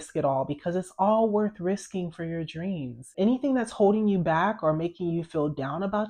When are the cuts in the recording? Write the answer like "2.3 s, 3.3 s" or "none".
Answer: 3.1 s